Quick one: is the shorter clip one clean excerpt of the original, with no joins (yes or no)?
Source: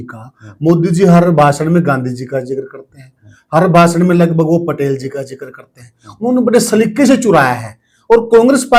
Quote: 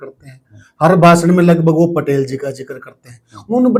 yes